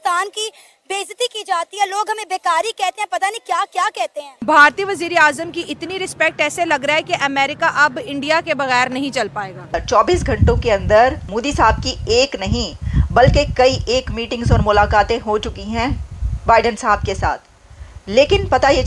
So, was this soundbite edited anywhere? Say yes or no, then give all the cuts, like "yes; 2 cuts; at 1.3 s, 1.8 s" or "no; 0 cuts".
yes; 3 cuts; at 4.3 s, 9.7 s, 11.3 s